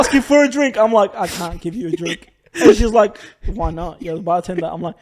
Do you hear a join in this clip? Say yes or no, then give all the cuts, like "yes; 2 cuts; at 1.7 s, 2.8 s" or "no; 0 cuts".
no; 0 cuts